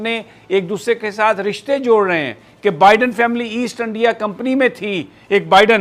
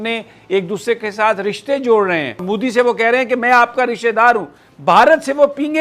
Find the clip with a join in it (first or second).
second